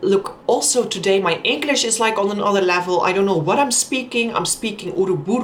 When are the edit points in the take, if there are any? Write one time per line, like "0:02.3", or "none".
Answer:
none